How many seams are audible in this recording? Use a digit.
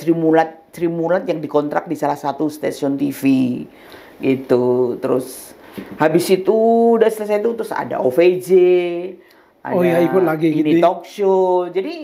0